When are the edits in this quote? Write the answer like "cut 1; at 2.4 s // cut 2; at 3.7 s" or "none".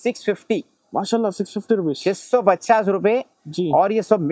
none